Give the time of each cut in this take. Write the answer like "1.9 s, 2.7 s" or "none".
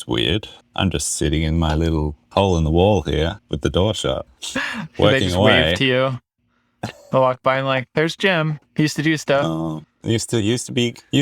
3.4 s, 4.3 s, 8.6 s, 9.9 s